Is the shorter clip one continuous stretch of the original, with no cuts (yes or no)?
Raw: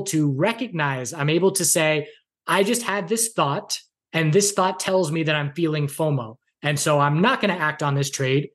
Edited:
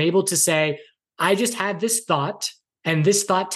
yes